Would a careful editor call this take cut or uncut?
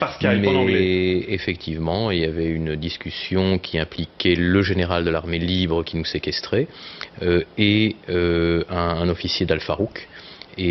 uncut